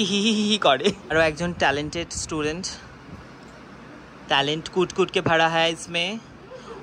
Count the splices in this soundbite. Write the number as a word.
one